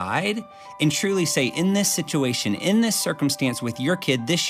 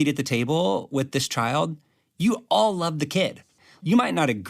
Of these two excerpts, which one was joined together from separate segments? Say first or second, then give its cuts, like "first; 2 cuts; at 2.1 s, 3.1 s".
second; 1 cut; at 3.6 s